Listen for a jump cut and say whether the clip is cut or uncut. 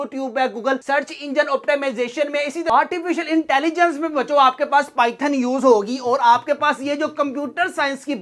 uncut